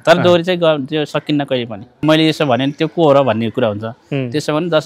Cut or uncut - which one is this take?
cut